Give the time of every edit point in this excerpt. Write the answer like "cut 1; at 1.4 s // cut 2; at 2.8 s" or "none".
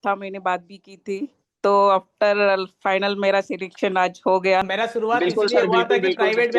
cut 1; at 4.6 s